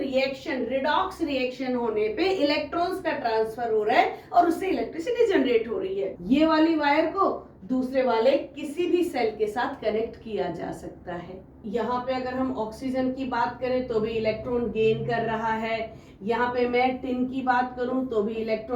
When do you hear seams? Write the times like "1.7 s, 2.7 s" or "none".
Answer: 6.1 s, 11.5 s